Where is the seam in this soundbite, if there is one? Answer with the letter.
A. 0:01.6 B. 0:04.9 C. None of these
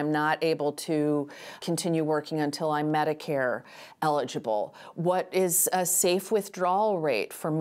A